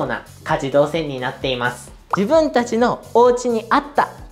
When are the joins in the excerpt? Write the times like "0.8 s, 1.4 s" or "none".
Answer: 2.0 s

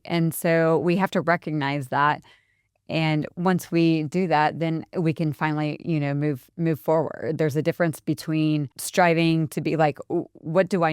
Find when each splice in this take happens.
8.8 s

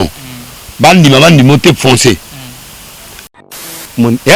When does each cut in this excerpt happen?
3.3 s

